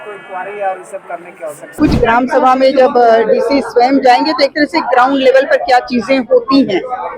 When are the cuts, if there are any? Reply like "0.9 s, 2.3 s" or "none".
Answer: 1.6 s